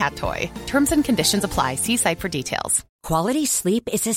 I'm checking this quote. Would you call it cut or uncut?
uncut